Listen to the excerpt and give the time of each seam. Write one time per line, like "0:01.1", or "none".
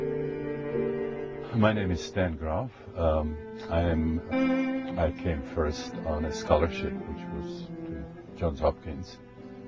none